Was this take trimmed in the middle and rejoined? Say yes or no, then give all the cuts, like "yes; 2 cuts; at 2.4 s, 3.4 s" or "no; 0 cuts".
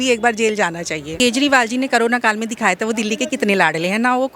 yes; 1 cut; at 1.1 s